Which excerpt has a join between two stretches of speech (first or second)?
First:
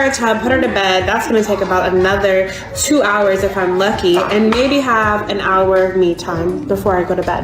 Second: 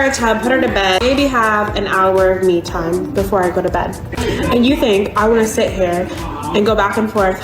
second